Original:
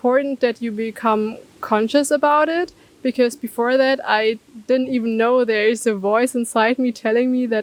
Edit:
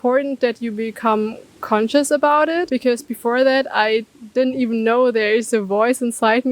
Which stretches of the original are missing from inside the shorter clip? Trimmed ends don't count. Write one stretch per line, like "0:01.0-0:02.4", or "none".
0:02.7-0:03.0